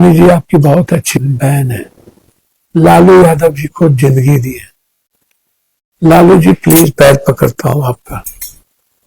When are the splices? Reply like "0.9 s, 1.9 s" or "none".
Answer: 1.2 s